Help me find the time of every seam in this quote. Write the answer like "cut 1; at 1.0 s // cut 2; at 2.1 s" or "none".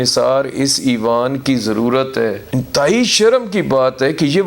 cut 1; at 2.4 s